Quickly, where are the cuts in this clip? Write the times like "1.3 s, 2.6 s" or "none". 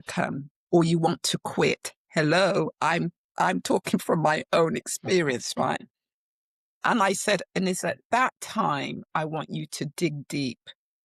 none